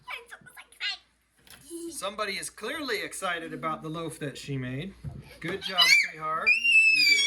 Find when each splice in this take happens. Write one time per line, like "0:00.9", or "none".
none